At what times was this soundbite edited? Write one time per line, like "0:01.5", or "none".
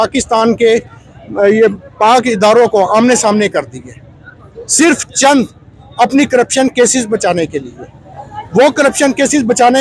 none